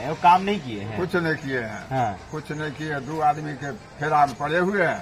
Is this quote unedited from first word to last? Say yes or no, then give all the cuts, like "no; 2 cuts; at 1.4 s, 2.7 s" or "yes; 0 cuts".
yes; 0 cuts